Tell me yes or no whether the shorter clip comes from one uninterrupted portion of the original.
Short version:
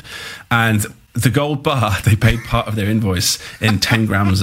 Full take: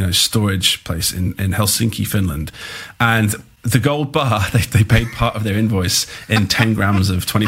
no